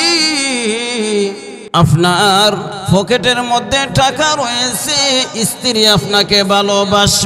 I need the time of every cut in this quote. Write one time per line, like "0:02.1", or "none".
0:01.5
0:02.7